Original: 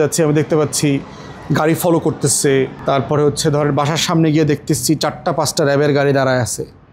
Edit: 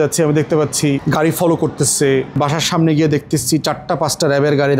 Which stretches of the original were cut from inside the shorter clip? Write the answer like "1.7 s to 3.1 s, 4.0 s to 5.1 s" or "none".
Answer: 1.0 s to 1.5 s, 2.8 s to 3.7 s

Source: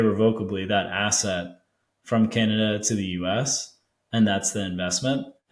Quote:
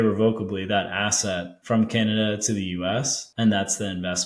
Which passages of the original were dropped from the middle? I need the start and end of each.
1.5 s to 1.9 s, 3.6 s to 3.9 s

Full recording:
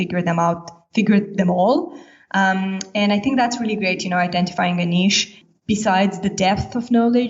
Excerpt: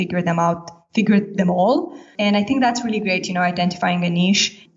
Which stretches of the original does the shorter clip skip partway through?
2.1 s to 2.8 s

